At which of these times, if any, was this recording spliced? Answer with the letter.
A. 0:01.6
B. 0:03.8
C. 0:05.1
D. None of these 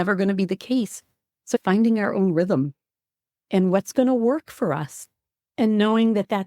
A